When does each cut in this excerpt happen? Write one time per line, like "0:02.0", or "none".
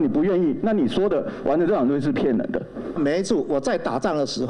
0:03.0

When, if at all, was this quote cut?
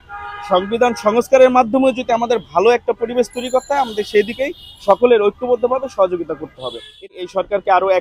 0:07.0

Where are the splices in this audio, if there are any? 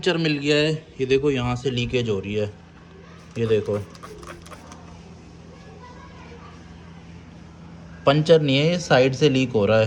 none

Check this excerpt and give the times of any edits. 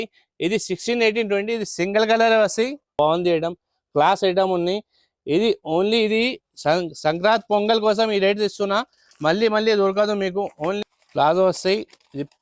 0:02.9
0:10.8

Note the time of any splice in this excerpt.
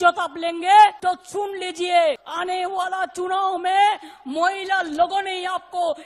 0:01.0
0:02.3

